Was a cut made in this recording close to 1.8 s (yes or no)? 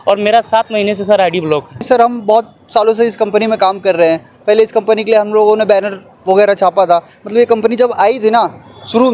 yes